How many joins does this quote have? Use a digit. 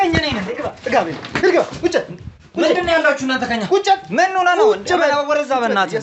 0